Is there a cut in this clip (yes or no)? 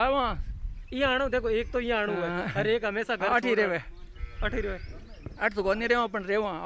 no